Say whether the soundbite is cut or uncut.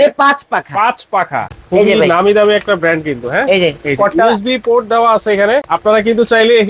cut